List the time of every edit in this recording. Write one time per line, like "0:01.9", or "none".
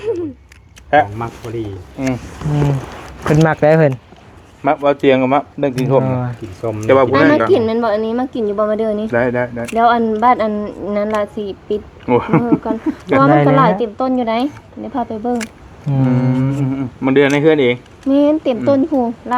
none